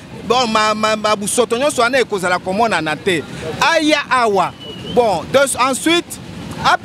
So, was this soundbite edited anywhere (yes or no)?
no